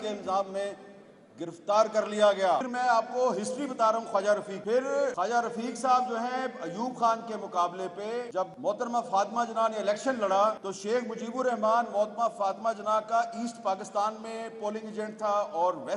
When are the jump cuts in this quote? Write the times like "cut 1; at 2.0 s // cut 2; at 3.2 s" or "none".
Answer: cut 1; at 2.7 s // cut 2; at 5.0 s // cut 3; at 8.4 s // cut 4; at 10.7 s